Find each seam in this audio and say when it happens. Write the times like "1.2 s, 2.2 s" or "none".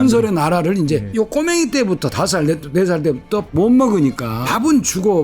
1.1 s, 3.5 s, 4.4 s